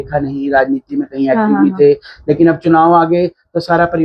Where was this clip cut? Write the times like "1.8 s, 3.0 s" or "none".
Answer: none

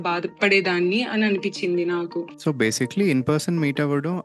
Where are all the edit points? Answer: 2.3 s

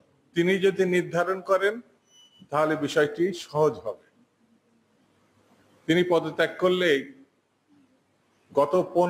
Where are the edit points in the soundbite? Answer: none

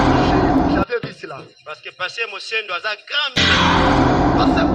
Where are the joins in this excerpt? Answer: 0.8 s, 3.5 s

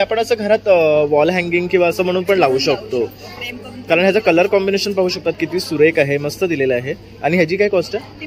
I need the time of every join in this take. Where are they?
none

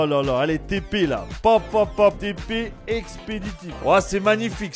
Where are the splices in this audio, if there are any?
2.2 s, 3.8 s

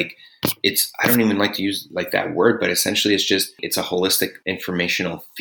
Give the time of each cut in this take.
3.6 s, 4.4 s

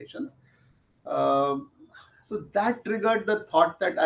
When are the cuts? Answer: none

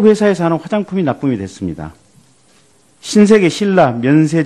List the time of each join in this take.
none

